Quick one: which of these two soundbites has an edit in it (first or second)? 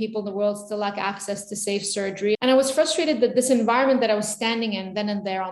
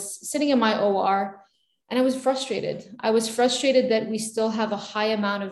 first